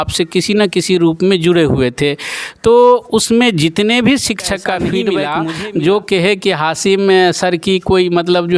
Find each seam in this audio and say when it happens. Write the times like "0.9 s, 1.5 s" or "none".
5.2 s